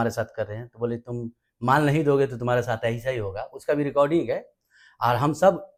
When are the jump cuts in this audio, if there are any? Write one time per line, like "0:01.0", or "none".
none